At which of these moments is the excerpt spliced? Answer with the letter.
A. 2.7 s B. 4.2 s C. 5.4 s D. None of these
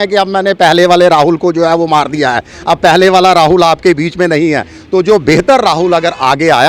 D